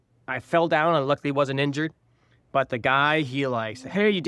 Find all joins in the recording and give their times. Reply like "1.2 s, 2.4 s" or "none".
none